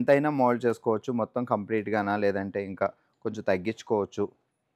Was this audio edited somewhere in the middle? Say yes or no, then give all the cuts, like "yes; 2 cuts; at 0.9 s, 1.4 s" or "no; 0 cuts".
no; 0 cuts